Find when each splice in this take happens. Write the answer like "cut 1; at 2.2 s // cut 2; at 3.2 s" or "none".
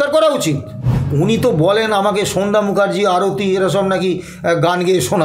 cut 1; at 1.0 s